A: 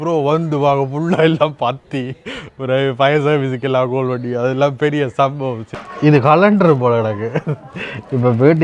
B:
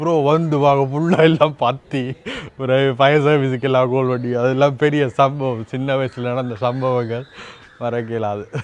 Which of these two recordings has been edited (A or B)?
A